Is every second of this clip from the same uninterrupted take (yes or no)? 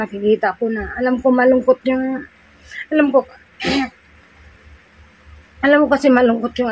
yes